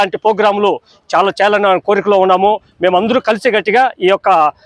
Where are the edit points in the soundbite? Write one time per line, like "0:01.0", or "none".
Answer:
none